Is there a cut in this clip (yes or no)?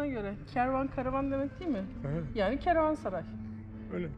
no